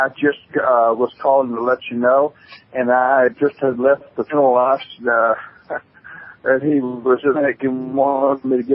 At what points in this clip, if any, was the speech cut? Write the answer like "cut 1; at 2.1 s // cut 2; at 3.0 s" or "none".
none